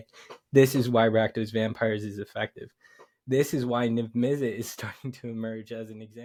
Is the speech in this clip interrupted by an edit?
no; 0 cuts

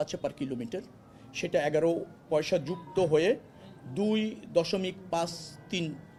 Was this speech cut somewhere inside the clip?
no; 0 cuts

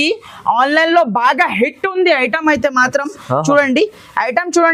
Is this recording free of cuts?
yes; 0 cuts

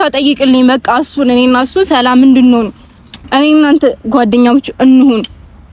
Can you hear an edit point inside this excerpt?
yes; 1 cut; at 3.2 s

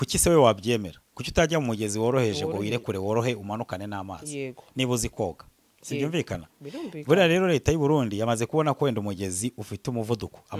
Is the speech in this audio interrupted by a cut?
no; 0 cuts

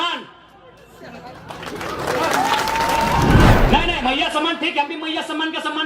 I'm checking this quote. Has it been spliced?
yes; 1 cut; at 3.5 s

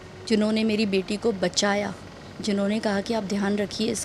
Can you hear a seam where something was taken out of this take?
no; 0 cuts

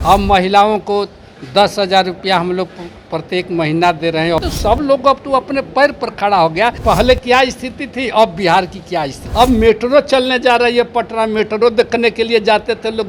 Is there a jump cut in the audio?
yes; 3 cuts; at 4.4 s, 6.8 s, 9.2 s

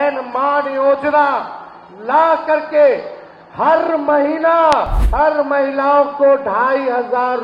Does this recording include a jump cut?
yes; 1 cut; at 5.0 s

